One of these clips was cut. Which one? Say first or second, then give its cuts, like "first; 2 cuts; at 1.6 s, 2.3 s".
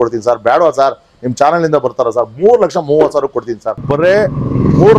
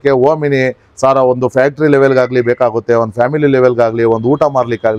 first; 1 cut; at 3.9 s